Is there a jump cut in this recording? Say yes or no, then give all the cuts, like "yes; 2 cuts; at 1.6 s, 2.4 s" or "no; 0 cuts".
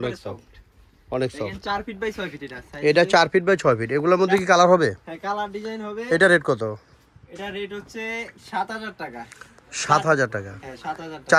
no; 0 cuts